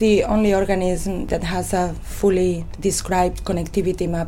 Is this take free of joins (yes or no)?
no